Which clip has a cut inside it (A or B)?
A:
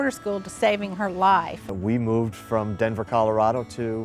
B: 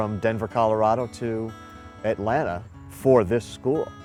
A